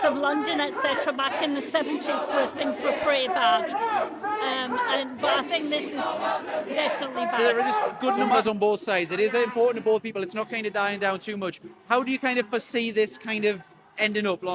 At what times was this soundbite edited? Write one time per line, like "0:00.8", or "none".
0:08.4